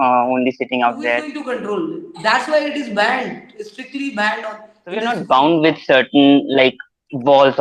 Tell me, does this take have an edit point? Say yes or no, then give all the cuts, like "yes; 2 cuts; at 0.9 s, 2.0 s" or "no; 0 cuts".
yes; 2 cuts; at 1.3 s, 5.1 s